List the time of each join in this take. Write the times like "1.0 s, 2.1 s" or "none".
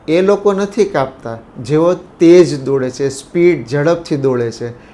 none